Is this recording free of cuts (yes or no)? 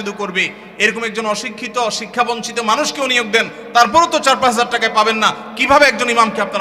yes